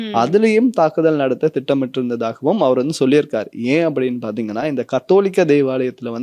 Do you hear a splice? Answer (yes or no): no